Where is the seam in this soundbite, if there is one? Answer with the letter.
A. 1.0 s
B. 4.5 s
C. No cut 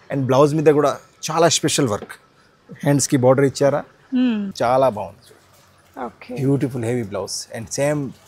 B